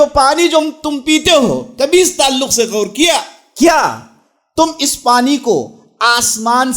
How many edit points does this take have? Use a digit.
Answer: 1